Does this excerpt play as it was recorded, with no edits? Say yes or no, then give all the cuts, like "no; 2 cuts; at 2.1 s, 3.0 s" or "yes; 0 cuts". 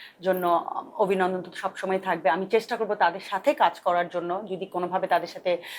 yes; 0 cuts